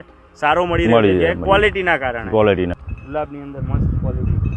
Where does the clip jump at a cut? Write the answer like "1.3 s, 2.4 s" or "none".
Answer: 2.8 s